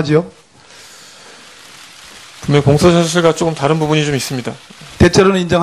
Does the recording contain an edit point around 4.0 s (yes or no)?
yes